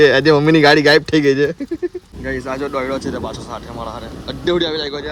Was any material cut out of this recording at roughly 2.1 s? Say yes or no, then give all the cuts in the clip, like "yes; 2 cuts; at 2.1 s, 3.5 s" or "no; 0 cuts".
yes; 1 cut; at 2.1 s